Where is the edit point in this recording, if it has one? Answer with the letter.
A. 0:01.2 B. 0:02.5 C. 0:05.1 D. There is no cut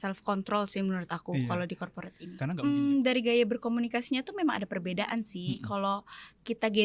B